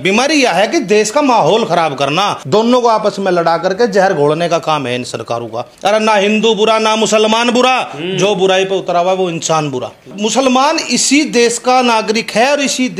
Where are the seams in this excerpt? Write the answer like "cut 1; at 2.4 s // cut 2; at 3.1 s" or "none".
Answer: cut 1; at 2.4 s // cut 2; at 5.7 s // cut 3; at 10.1 s